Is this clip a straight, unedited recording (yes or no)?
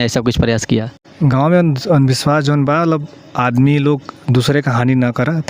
no